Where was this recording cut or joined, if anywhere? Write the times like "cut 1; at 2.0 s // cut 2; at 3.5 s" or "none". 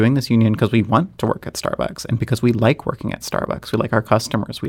none